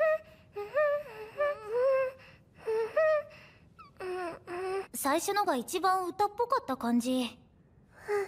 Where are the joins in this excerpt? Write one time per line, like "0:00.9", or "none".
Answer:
none